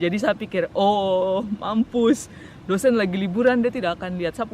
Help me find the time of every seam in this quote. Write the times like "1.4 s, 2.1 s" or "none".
none